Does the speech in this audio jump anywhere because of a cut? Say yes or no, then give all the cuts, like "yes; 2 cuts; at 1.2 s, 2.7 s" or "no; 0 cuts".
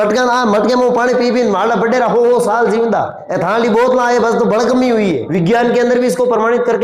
yes; 2 cuts; at 3.2 s, 5.3 s